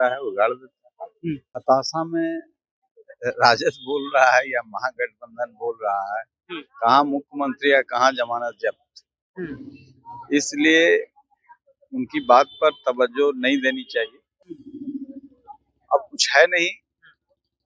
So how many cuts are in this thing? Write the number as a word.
one